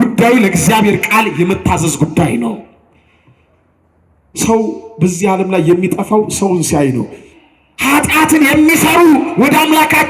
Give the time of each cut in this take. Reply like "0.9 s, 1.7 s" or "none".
7.3 s